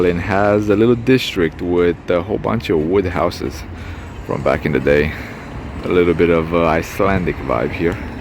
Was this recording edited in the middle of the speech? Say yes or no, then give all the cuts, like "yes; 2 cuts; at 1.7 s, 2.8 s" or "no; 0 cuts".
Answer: no; 0 cuts